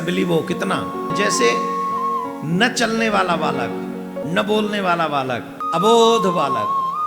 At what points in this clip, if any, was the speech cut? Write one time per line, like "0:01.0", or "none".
0:01.1
0:04.2
0:05.6

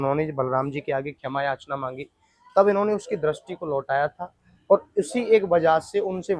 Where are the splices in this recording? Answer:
none

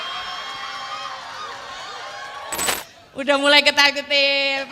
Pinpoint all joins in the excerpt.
0:02.8

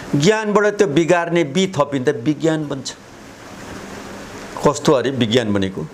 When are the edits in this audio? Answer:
none

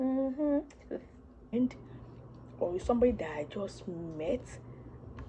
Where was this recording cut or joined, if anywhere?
0:01.5

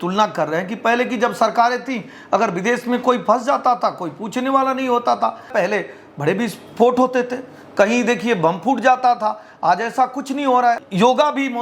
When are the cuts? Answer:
0:05.5
0:10.8

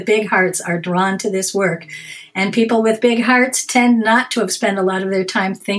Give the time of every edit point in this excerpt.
none

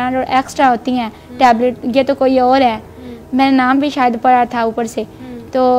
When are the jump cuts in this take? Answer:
none

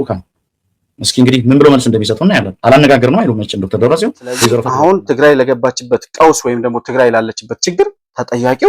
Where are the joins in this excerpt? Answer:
0:04.7

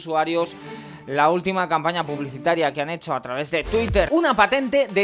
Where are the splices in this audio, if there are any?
0:04.1

